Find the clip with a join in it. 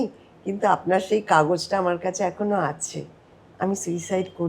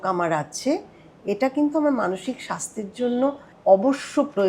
second; 1 cut; at 3.5 s

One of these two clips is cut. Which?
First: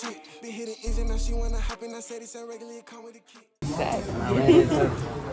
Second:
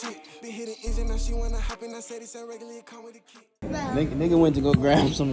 first; 1 cut; at 3.6 s

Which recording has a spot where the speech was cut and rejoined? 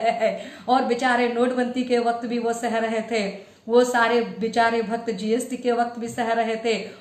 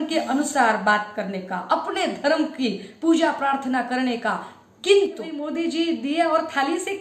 second; 1 cut; at 5.4 s

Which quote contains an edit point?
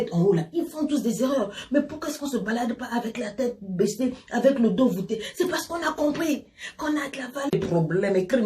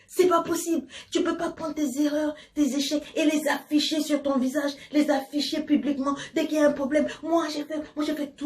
first; 1 cut; at 7.5 s

